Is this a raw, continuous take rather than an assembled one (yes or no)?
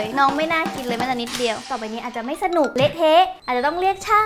no